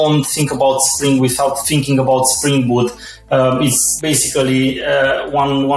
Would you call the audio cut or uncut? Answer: cut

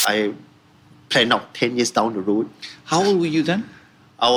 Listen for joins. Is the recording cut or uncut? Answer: uncut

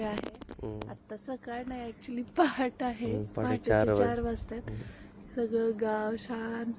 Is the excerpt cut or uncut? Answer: uncut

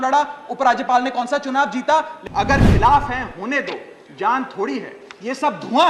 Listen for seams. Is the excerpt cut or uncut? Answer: cut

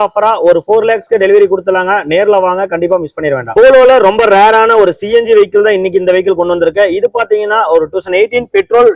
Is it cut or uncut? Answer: uncut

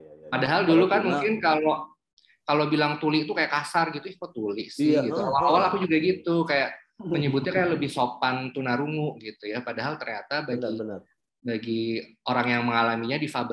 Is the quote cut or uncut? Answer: uncut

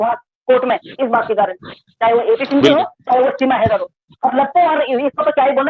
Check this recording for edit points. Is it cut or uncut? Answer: uncut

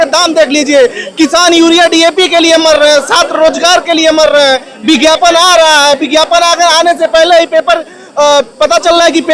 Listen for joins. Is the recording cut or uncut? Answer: uncut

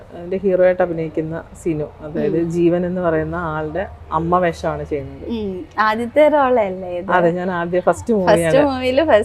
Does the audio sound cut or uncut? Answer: uncut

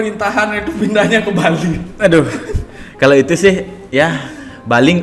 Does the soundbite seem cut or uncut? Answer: cut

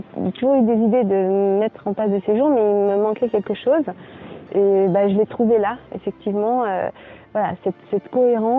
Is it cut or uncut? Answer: uncut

